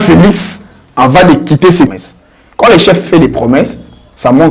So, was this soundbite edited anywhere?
no; 0 cuts

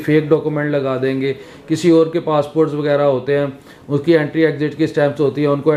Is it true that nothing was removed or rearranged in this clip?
yes; 0 cuts

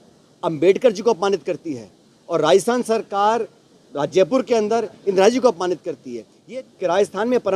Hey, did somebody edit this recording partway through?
yes; 1 cut; at 6.4 s

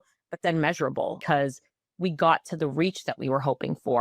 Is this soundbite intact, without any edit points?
no; 1 cut; at 1.2 s

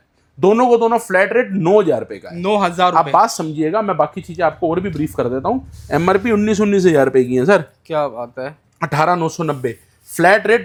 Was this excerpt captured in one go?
yes; 0 cuts

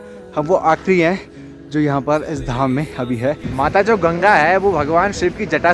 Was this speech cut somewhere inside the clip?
yes; 1 cut; at 3.5 s

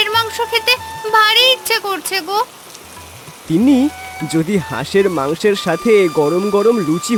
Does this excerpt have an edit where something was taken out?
no; 0 cuts

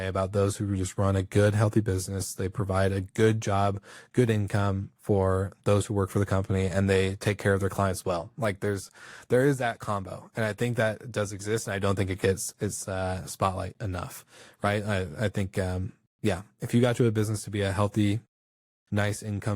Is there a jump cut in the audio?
no; 0 cuts

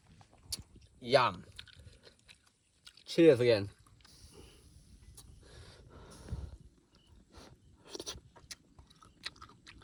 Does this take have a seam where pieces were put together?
no; 0 cuts

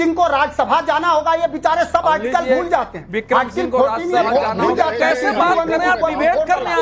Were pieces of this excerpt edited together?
no; 0 cuts

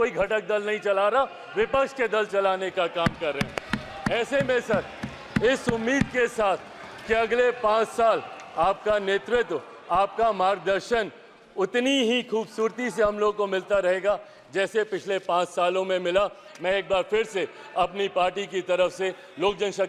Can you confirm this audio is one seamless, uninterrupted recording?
yes; 0 cuts

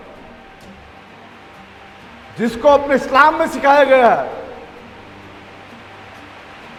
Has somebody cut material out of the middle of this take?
no; 0 cuts

